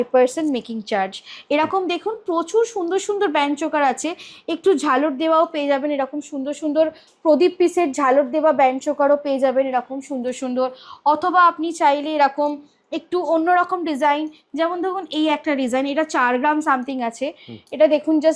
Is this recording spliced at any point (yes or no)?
no